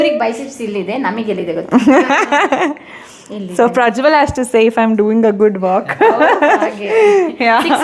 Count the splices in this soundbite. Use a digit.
0